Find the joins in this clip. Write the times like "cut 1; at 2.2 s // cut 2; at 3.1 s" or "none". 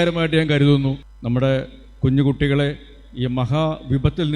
cut 1; at 1.1 s